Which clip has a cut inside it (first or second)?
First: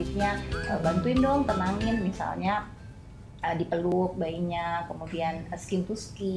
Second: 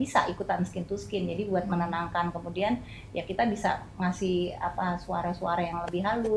first